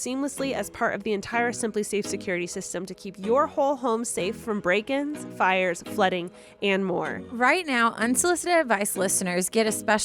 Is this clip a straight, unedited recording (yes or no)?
no